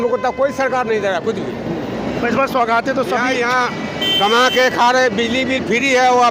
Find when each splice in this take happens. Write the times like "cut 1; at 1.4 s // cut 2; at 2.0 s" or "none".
none